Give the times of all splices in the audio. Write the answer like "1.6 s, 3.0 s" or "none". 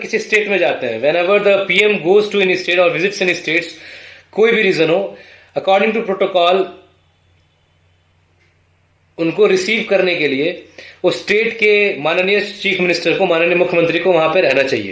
none